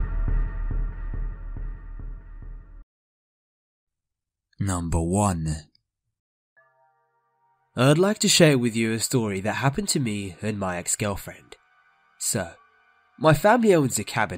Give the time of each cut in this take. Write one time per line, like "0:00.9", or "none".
none